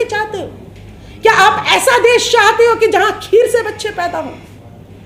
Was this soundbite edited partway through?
no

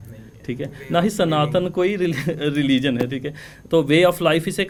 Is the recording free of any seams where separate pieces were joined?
yes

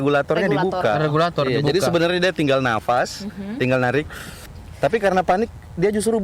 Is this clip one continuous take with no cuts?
yes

